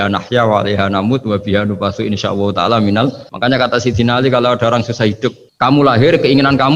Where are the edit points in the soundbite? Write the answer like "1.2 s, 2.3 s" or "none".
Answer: 3.3 s, 5.4 s